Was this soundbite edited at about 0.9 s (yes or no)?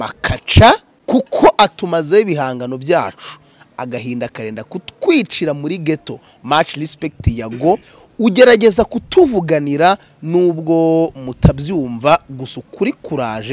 yes